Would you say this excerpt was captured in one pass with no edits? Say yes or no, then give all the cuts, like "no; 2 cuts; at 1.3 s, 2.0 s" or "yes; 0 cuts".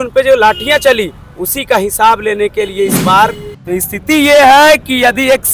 no; 1 cut; at 3.5 s